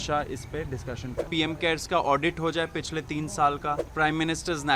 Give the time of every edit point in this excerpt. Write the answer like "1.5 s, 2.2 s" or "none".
1.3 s, 3.9 s

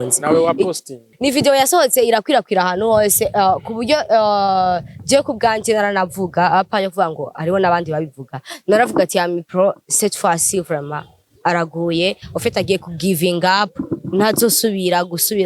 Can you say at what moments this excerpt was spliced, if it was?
1.1 s

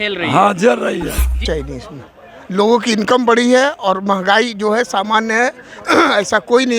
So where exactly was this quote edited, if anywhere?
1.4 s

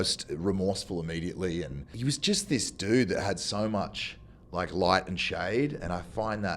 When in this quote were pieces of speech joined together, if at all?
1.8 s

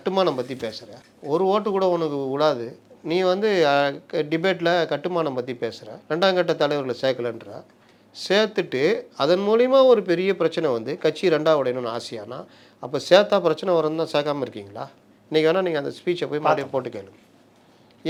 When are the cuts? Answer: none

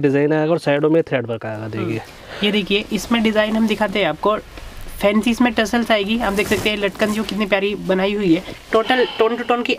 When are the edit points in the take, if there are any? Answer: none

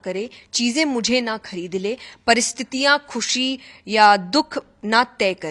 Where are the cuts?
none

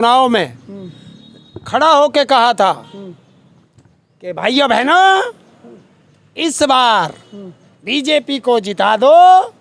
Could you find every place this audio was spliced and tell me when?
none

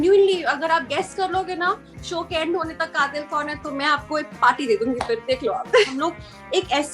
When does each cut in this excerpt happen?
5.9 s

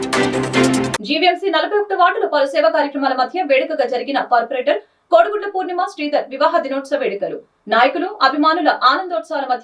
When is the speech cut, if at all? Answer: 0.9 s

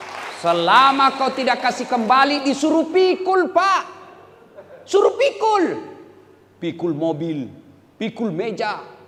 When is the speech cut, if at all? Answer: none

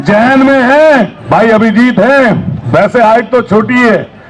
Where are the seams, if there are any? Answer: 1.2 s, 2.5 s

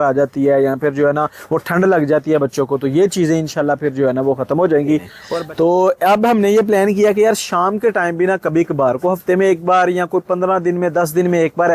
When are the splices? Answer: 5.4 s

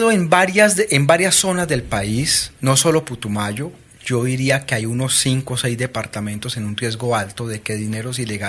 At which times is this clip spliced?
none

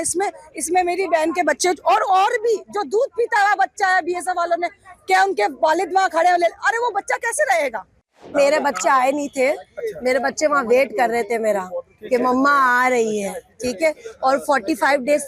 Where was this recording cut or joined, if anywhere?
8.3 s

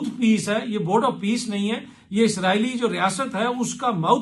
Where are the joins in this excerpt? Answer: none

